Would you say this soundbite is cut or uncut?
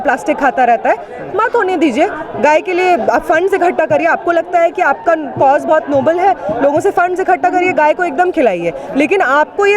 uncut